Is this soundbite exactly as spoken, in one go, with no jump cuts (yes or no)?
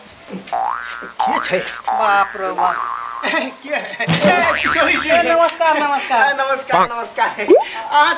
yes